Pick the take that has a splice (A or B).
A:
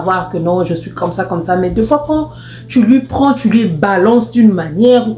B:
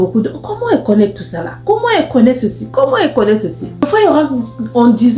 B